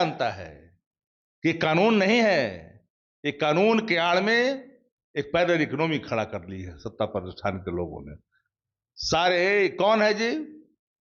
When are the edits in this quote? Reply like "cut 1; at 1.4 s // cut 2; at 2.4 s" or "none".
none